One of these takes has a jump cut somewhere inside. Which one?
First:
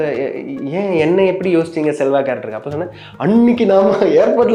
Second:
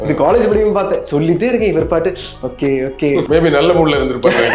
second; 1 cut; at 3.2 s

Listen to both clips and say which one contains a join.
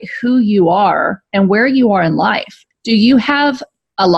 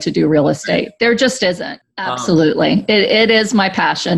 second; 1 cut; at 1.7 s

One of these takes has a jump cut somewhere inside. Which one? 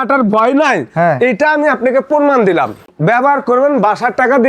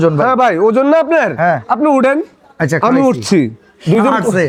first; 1 cut; at 2.9 s

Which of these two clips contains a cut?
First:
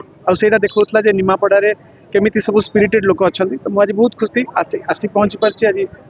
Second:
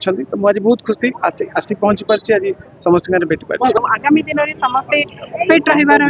second; 1 cut; at 3.8 s

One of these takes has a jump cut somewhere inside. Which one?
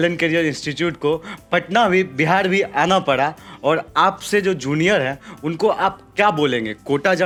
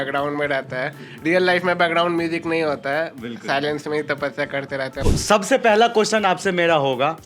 second; 1 cut; at 5.1 s

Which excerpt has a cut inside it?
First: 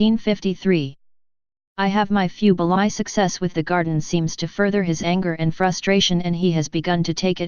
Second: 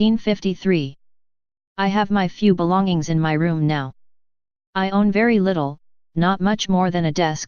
second; 1 cut; at 2.8 s

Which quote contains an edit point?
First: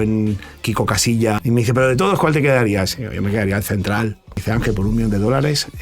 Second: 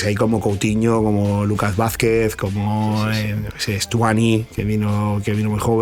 first; 2 cuts; at 1.4 s, 4.4 s

